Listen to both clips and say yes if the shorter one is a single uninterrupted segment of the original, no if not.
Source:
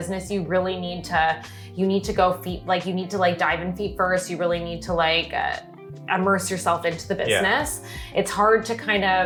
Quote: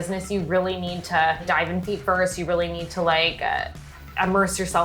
no